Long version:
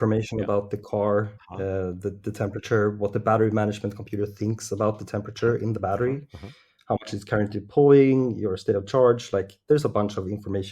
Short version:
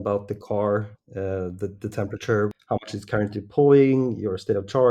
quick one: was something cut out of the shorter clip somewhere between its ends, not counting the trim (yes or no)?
yes